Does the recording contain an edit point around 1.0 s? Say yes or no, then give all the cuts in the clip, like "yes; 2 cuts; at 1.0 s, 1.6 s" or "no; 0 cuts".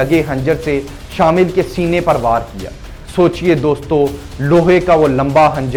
no; 0 cuts